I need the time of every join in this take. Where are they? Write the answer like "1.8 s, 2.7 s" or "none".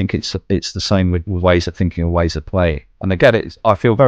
1.2 s, 2.9 s